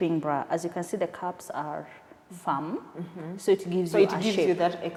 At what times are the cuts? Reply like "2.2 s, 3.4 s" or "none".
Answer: none